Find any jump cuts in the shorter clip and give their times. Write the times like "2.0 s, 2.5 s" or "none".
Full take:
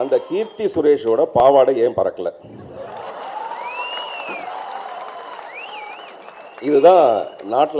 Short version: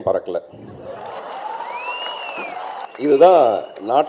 2.9 s